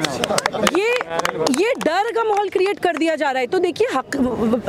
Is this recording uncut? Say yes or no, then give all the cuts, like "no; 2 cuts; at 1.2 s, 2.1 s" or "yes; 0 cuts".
yes; 0 cuts